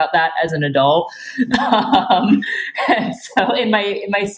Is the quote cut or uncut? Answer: uncut